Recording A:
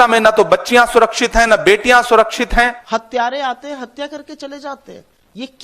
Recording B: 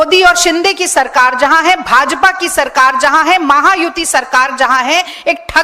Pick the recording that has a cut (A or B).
A